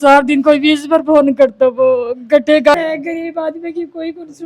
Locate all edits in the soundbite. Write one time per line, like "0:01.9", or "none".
0:02.7

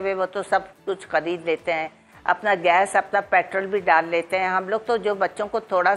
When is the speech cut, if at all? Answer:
none

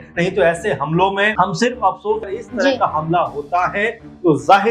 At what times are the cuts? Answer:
0:01.3
0:02.4

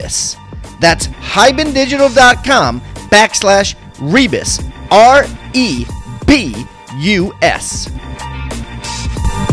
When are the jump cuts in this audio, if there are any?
0:07.7

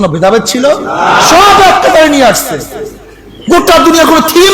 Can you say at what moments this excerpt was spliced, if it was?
none

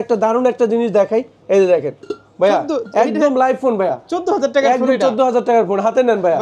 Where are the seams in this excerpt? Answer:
none

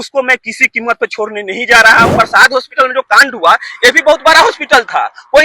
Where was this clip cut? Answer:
0:02.1

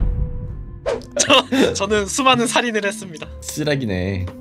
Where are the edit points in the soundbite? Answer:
0:00.9

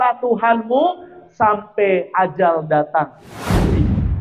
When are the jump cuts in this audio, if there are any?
0:03.2

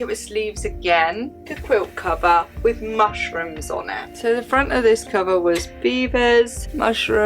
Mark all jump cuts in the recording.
0:01.3
0:04.0

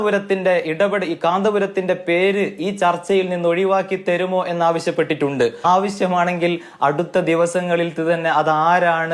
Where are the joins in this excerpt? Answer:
0:05.7

